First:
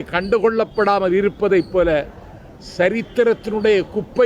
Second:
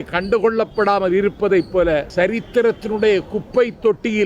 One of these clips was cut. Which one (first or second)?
second